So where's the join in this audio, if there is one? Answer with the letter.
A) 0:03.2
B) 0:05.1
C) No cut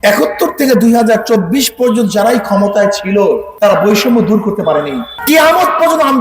B